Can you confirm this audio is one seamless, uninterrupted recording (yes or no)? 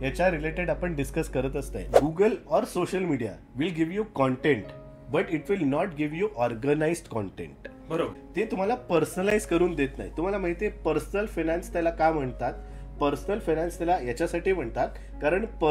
no